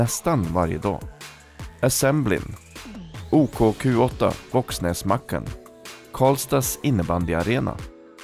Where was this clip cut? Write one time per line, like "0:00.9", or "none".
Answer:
none